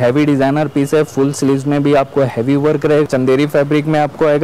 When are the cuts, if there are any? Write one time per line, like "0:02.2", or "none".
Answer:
0:03.1